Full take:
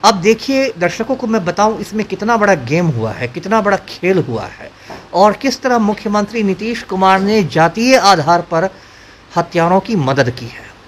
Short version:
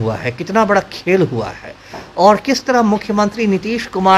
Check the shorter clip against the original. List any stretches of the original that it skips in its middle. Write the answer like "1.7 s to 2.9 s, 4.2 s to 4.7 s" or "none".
none